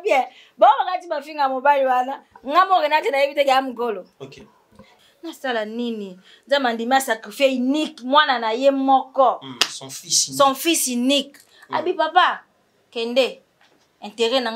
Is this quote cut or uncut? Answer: cut